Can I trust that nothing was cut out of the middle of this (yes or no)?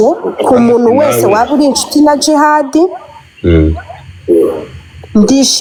yes